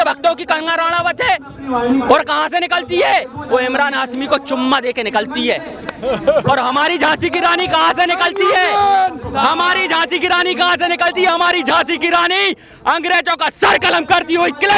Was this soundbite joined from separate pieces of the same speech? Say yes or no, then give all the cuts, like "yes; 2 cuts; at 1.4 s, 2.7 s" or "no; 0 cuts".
no; 0 cuts